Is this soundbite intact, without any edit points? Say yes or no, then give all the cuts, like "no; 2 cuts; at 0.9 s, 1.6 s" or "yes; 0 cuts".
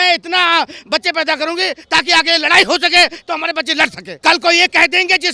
no; 1 cut; at 4.1 s